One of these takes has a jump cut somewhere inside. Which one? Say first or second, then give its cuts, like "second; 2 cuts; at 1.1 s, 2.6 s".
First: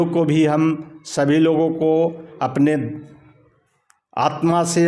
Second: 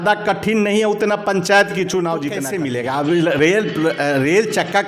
second; 1 cut; at 2.5 s